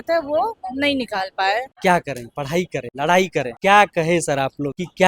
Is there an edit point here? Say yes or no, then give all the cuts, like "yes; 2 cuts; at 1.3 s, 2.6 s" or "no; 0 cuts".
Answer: yes; 1 cut; at 1.8 s